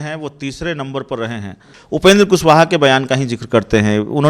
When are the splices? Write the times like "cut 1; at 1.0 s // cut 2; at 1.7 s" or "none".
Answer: cut 1; at 1.7 s